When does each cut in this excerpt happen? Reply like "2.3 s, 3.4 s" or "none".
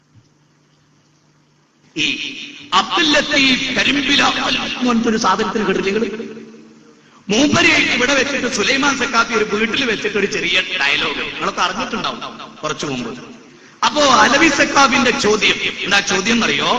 15.7 s